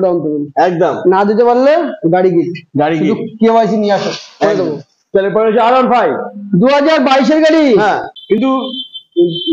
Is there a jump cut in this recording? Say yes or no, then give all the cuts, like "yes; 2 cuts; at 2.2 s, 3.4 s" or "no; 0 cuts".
yes; 1 cut; at 8.1 s